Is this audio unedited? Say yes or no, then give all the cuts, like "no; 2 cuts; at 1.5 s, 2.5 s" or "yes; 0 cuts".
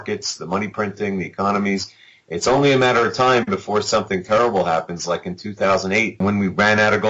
no; 1 cut; at 6.2 s